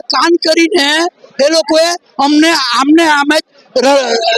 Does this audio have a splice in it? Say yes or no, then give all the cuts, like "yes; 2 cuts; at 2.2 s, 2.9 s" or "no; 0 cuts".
no; 0 cuts